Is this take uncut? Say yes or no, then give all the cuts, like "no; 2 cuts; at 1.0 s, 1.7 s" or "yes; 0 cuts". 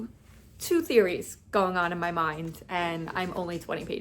yes; 0 cuts